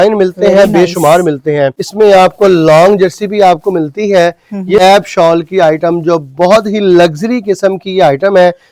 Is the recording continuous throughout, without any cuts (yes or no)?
no